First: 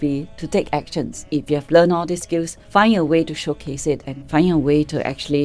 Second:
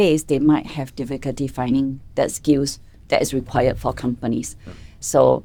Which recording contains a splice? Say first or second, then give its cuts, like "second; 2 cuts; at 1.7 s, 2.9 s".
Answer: first; 2 cuts; at 1.3 s, 2.6 s